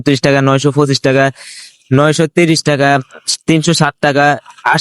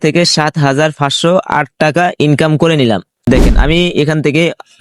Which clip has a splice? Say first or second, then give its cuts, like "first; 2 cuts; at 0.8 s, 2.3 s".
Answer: second; 1 cut; at 3.3 s